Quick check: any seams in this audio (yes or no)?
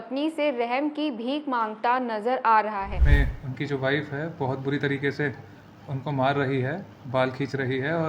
yes